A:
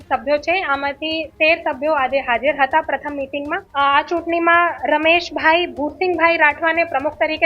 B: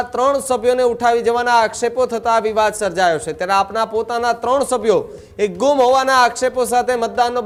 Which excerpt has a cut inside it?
A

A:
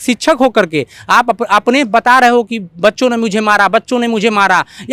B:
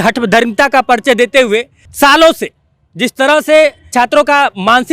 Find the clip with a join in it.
B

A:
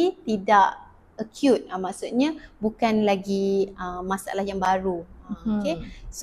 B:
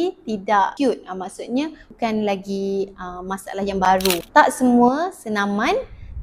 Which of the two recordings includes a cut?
B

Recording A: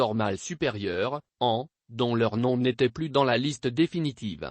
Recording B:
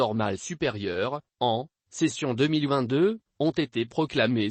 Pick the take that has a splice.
A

